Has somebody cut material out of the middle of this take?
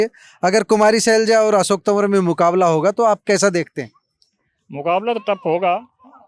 no; 0 cuts

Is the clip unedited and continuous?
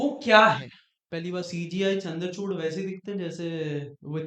no; 1 cut; at 1.5 s

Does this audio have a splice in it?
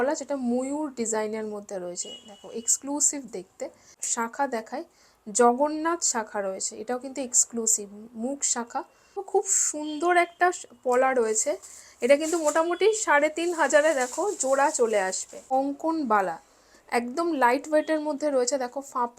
yes; 3 cuts; at 3.9 s, 9.3 s, 15.4 s

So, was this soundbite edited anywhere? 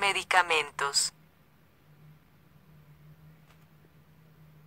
no; 0 cuts

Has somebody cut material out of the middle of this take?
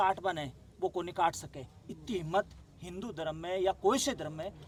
no; 0 cuts

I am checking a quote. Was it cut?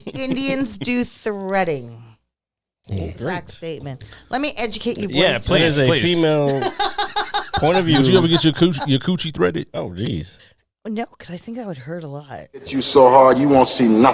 yes; 1 cut; at 12.8 s

